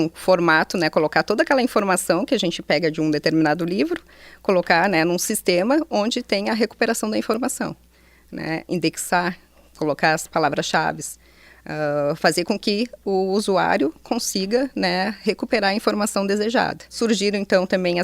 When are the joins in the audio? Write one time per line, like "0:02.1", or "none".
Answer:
0:17.0